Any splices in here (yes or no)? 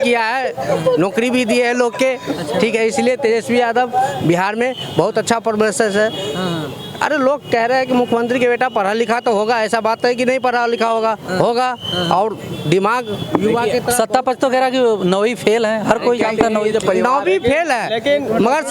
no